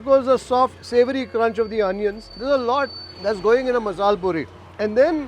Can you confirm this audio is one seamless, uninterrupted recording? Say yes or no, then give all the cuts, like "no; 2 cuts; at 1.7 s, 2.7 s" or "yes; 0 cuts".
no; 2 cuts; at 2.4 s, 3.1 s